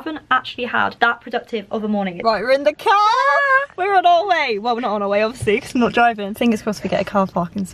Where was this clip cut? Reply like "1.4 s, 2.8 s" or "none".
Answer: 0.9 s, 2.2 s, 6.3 s